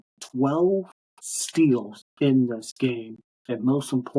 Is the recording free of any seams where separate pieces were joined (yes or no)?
yes